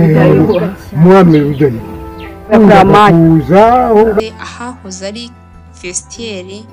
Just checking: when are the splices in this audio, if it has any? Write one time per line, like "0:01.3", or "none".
0:04.2